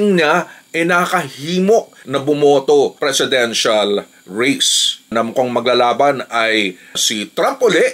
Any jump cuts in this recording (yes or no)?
yes